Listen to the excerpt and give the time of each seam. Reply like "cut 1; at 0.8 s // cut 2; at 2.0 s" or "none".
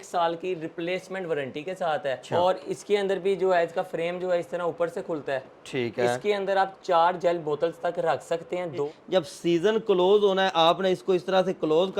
cut 1; at 2.3 s // cut 2; at 8.9 s